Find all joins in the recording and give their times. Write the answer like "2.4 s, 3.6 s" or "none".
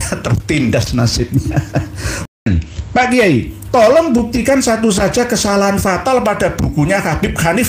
2.3 s